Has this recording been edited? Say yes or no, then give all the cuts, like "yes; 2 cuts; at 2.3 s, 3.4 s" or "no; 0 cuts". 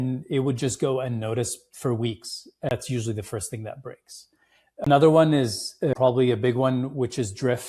yes; 3 cuts; at 2.7 s, 4.9 s, 5.9 s